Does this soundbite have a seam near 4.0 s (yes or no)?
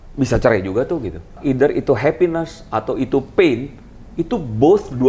no